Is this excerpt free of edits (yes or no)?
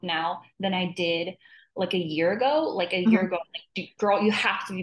yes